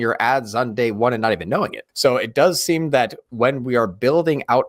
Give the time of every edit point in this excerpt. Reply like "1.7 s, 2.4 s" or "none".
1.8 s